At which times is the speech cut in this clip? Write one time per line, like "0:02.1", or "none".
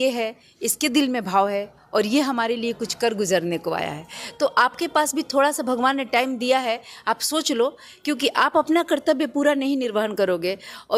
none